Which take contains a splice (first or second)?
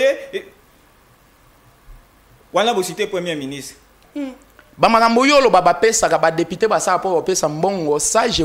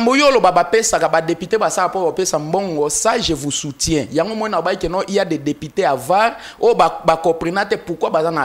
first